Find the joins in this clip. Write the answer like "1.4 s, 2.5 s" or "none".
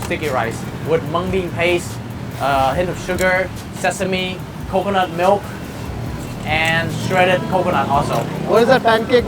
none